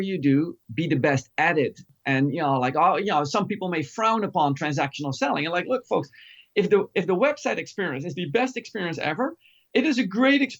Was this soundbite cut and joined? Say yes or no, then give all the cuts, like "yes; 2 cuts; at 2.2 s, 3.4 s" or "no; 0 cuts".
yes; 1 cut; at 1.8 s